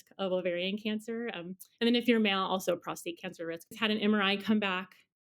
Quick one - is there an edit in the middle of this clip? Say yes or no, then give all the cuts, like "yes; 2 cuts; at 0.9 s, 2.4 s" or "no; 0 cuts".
yes; 1 cut; at 3.8 s